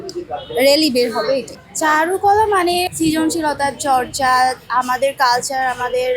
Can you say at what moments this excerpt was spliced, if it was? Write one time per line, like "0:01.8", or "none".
0:01.5
0:02.9